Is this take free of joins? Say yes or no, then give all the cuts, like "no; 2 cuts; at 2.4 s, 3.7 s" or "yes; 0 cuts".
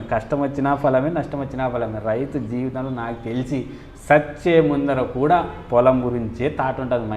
yes; 0 cuts